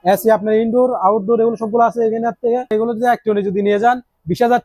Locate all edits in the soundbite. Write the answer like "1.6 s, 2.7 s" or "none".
2.7 s